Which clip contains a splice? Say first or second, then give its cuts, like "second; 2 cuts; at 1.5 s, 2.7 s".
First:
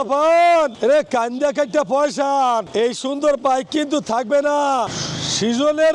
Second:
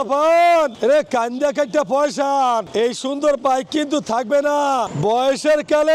second; 1 cut; at 4.9 s